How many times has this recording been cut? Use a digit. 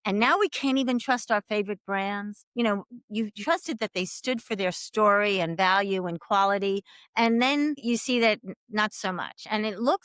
1